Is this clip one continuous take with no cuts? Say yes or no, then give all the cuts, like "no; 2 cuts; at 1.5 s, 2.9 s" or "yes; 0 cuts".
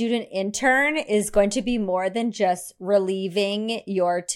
yes; 0 cuts